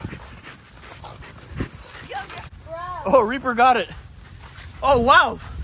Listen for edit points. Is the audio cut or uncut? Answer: cut